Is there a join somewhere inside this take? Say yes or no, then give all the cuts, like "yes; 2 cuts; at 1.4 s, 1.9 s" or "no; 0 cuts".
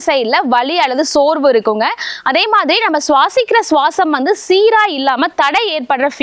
no; 0 cuts